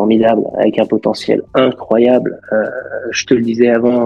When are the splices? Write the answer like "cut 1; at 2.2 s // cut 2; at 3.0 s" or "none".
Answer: none